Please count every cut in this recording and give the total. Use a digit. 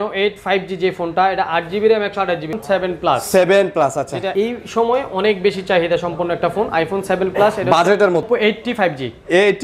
3